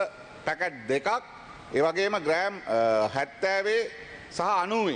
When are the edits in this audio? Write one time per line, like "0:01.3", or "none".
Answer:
none